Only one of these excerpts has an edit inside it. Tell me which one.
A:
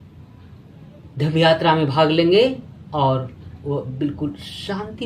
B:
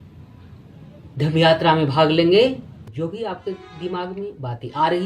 B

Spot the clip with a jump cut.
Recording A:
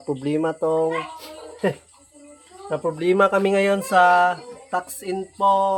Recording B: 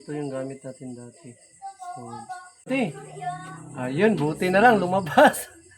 B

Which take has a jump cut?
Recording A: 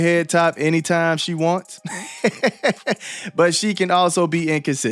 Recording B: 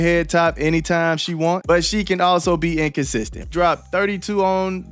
B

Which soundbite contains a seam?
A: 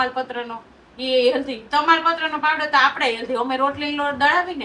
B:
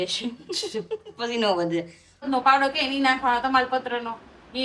B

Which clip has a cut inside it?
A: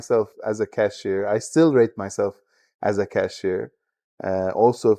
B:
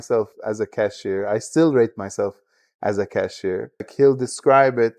B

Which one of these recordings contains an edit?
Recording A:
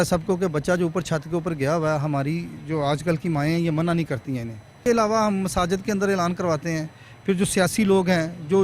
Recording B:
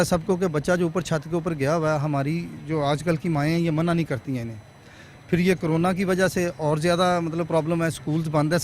A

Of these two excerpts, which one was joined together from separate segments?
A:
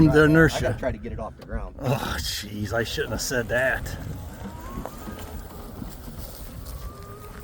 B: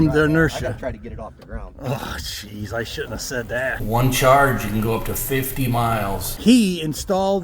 B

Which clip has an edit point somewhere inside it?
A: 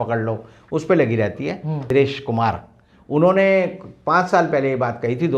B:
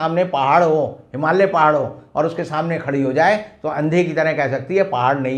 A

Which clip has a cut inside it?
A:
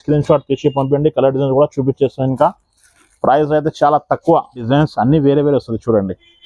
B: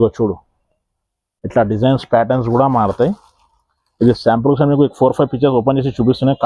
A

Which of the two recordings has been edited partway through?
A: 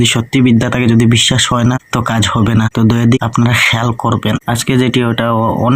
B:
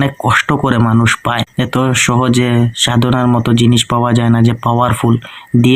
A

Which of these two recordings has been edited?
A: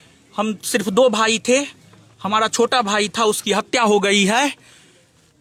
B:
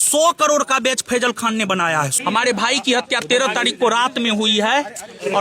B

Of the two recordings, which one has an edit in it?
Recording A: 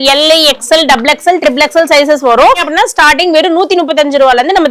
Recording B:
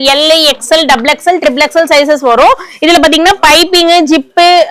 A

